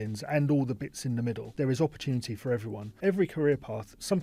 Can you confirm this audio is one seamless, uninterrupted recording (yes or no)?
no